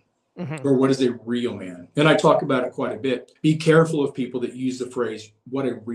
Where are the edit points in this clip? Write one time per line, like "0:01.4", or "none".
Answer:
0:03.3